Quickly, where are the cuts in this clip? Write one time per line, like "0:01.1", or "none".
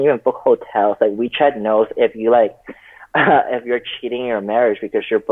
none